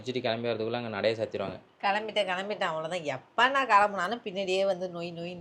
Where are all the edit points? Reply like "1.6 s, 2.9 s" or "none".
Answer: none